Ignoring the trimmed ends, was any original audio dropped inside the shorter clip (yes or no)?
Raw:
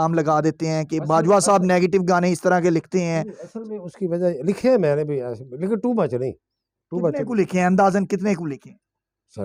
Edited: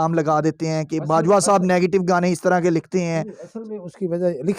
no